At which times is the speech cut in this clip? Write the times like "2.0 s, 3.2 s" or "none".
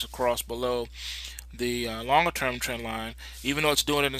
none